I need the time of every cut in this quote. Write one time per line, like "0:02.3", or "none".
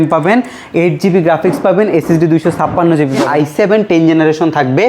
0:03.2